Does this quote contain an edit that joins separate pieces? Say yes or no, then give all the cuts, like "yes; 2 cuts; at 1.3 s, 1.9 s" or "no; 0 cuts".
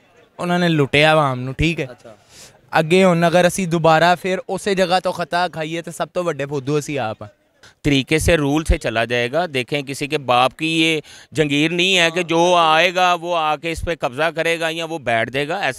yes; 1 cut; at 7.6 s